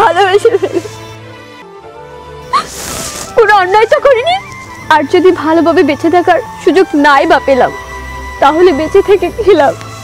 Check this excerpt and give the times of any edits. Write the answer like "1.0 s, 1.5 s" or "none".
none